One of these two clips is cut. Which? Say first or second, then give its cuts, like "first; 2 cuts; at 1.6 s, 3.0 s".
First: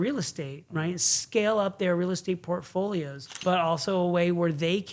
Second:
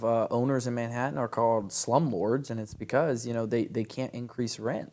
first; 1 cut; at 3.2 s